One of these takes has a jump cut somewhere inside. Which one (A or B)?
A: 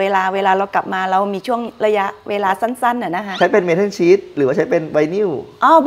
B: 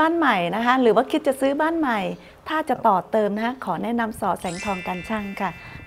A